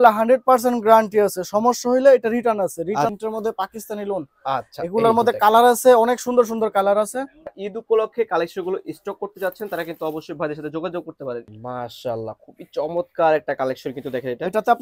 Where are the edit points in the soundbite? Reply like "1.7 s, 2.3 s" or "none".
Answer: 3.1 s, 7.5 s, 11.5 s